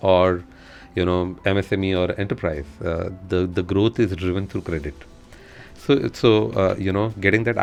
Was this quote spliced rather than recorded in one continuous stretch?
no; 0 cuts

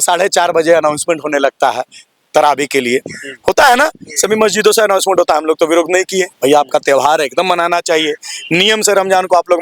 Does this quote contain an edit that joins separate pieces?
no; 0 cuts

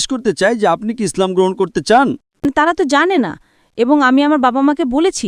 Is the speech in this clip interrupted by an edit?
yes; 1 cut; at 2.3 s

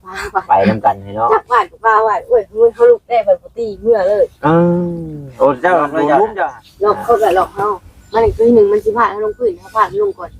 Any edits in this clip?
yes; 1 cut; at 6.6 s

